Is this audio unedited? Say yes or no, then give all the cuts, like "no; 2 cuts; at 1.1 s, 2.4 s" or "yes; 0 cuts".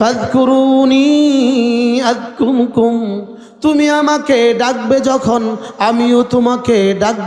yes; 0 cuts